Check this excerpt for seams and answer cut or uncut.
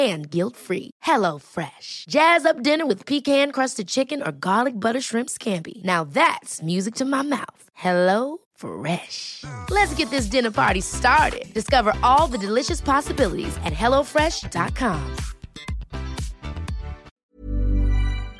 cut